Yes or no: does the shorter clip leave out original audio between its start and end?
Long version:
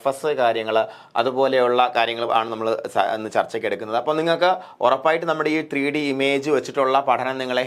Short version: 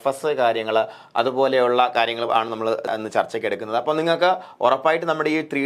yes